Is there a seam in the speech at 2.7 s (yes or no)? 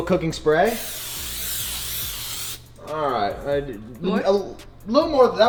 no